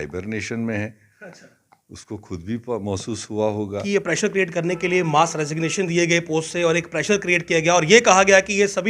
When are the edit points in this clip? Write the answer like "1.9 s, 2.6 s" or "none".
3.8 s